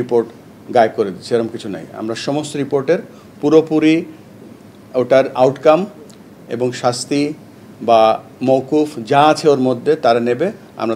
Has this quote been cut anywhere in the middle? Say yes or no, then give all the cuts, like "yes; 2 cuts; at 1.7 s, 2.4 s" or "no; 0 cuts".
no; 0 cuts